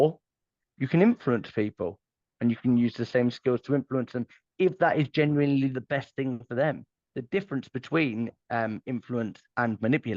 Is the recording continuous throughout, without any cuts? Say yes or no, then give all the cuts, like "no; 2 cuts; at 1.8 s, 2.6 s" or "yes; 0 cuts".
yes; 0 cuts